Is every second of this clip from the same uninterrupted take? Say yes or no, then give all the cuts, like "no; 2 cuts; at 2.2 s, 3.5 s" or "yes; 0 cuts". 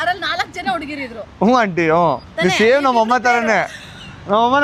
yes; 0 cuts